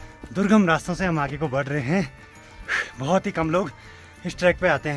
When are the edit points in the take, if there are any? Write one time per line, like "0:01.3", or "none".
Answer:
none